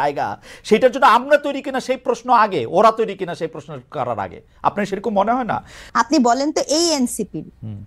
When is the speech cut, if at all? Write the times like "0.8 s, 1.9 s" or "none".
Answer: none